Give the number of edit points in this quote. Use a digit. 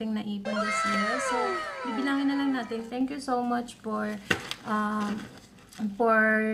1